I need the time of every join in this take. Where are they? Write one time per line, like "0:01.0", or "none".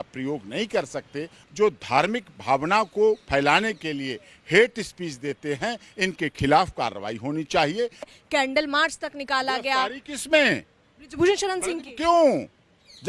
0:01.4
0:08.0